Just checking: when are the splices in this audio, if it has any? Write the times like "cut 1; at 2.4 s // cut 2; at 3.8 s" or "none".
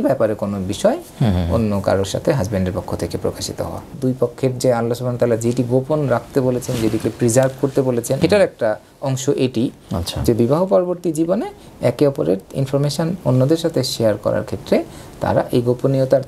cut 1; at 3.9 s // cut 2; at 8.2 s